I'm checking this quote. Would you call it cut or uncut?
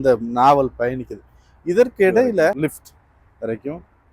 cut